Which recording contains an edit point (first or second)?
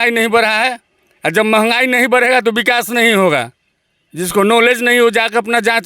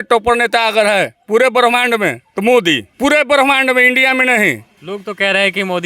second